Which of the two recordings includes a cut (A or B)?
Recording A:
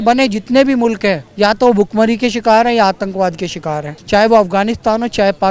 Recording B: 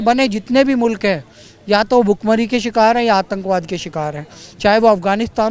A